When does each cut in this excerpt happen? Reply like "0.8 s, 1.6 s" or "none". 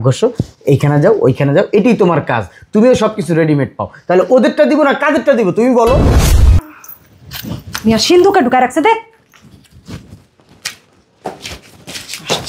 6.3 s